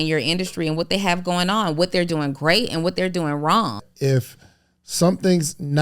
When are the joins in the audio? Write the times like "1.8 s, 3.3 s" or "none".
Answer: 3.9 s